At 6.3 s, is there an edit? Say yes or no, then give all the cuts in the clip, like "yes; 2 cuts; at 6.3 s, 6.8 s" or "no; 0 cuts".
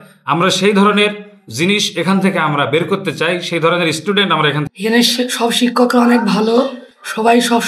no; 1 cut; at 4.7 s